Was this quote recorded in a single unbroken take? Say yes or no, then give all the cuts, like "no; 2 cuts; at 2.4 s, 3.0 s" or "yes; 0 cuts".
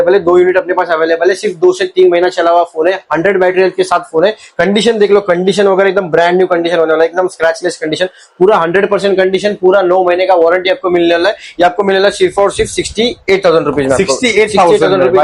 yes; 0 cuts